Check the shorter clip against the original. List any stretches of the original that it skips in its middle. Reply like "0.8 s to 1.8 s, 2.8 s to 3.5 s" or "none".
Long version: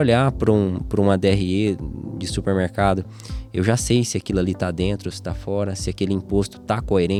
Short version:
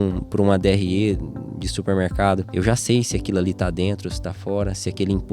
3.1 s to 3.5 s